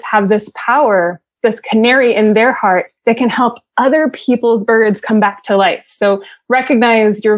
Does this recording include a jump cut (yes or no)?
yes